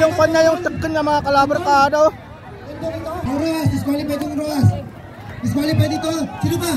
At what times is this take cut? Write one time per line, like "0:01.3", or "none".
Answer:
0:03.2

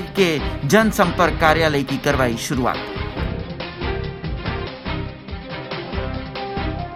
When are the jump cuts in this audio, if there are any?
none

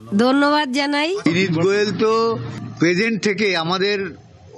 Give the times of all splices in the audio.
0:01.2

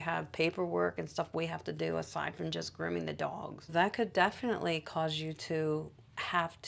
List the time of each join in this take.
none

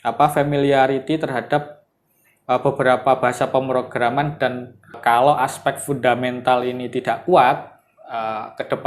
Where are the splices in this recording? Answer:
0:05.0

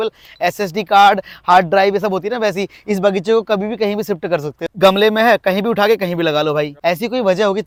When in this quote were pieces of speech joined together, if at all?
none

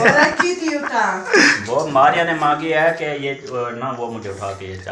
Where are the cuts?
none

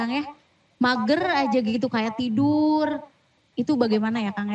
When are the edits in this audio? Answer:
0:03.4

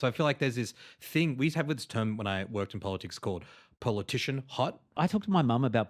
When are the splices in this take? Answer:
0:04.9

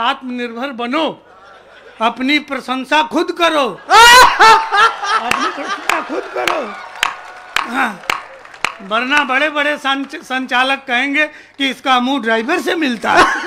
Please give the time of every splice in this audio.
none

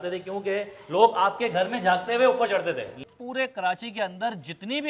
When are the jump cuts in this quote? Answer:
0:03.0

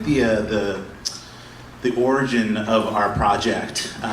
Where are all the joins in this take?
0:02.9

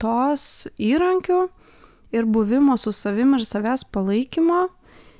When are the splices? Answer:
none

